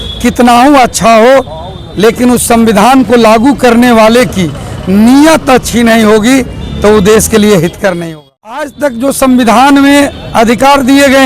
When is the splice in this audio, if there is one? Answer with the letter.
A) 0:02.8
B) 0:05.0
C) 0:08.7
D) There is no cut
C